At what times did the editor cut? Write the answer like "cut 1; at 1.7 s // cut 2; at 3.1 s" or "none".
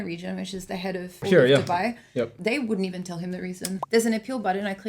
cut 1; at 1.2 s // cut 2; at 2.3 s // cut 3; at 3.7 s